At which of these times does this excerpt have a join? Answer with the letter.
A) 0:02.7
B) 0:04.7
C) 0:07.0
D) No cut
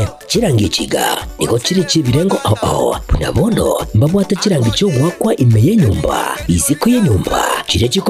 C